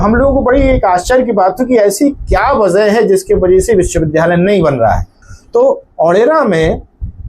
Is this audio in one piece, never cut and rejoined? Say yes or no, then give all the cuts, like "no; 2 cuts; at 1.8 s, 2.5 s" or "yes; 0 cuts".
no; 1 cut; at 5.2 s